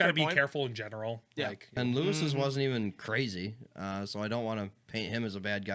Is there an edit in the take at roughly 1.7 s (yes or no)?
yes